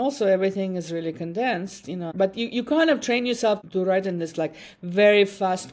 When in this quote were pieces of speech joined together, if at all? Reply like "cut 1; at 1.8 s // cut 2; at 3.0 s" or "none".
cut 1; at 2.1 s // cut 2; at 3.6 s